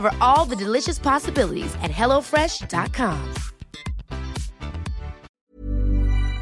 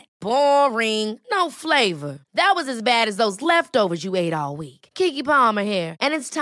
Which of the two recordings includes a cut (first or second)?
first